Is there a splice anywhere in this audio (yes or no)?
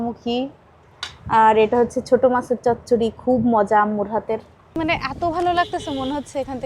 yes